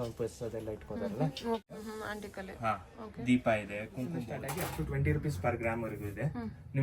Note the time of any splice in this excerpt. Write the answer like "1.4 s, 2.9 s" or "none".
1.6 s, 4.3 s